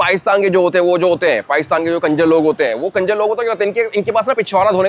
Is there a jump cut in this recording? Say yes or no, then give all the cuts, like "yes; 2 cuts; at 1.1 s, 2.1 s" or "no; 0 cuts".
no; 0 cuts